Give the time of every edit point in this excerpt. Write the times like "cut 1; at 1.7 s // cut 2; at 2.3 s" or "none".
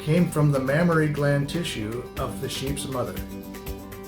cut 1; at 3.1 s